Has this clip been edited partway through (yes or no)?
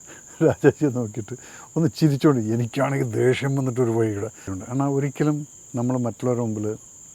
yes